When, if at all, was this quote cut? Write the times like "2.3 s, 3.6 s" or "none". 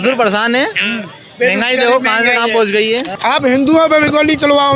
3.1 s